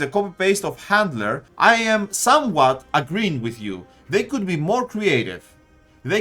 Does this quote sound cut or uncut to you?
cut